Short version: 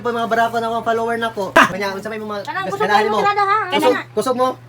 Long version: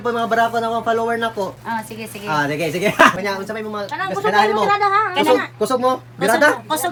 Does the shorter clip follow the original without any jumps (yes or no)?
no